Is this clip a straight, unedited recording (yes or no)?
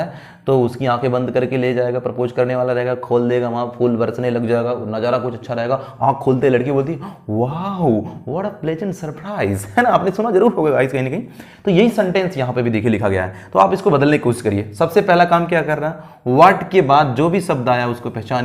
yes